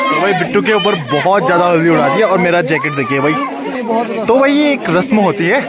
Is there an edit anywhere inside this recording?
yes; 1 cut; at 3.7 s

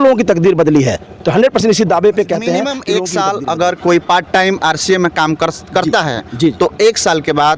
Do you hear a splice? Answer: yes; 1 cut; at 2.8 s

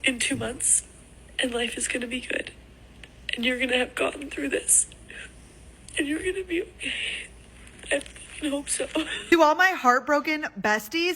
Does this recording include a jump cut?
yes; 1 cut; at 9.3 s

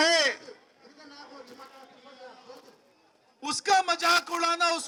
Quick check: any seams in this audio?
no; 0 cuts

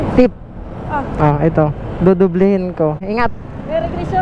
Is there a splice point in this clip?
yes; 1 cut; at 3.0 s

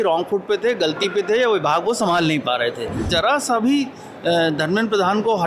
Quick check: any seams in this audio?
yes; 1 cut; at 3.0 s

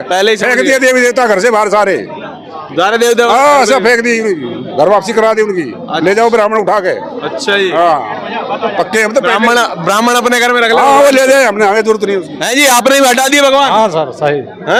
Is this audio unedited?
yes; 0 cuts

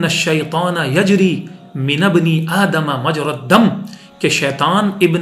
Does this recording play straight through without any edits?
yes; 0 cuts

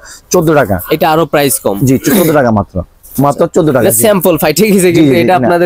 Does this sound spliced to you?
no; 0 cuts

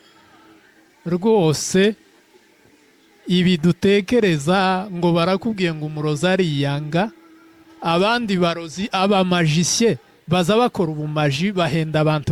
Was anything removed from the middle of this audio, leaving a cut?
no; 0 cuts

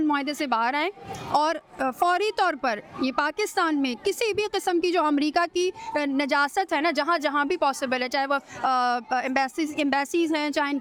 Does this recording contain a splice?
no; 0 cuts

